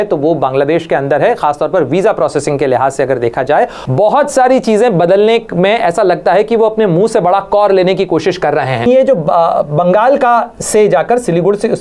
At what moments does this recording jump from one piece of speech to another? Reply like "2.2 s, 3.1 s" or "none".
3.8 s, 8.9 s